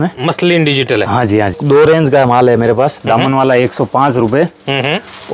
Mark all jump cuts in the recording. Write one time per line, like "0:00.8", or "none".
0:01.6